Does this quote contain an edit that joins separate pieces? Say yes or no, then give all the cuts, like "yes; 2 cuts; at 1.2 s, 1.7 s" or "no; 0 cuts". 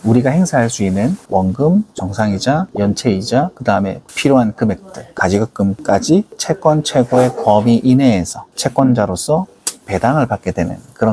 no; 0 cuts